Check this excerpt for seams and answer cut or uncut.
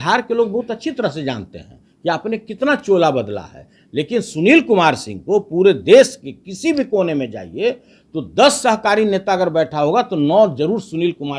uncut